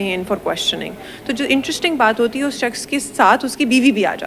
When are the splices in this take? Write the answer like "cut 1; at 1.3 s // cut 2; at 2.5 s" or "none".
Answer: none